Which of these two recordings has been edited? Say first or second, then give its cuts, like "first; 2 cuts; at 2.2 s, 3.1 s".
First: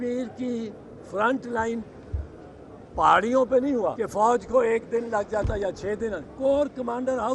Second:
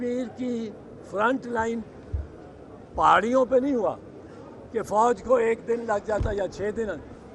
first; 2 cuts; at 4.0 s, 6.3 s